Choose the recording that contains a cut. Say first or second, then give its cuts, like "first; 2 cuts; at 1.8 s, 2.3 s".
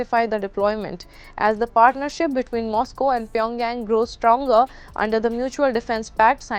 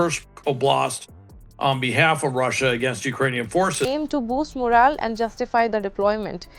second; 1 cut; at 3.8 s